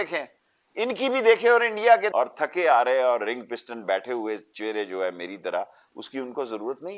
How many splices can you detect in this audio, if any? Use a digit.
1